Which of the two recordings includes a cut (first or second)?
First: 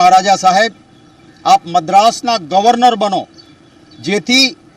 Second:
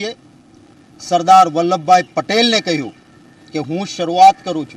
first